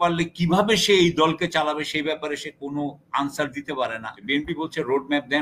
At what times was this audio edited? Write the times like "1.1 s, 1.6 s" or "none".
4.1 s